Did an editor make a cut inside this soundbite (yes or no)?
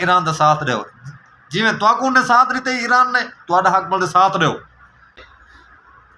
yes